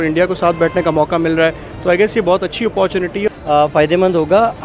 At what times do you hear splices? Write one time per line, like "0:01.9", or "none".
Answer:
0:03.3